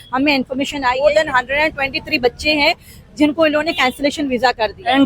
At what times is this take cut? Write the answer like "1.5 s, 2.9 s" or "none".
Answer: 1.0 s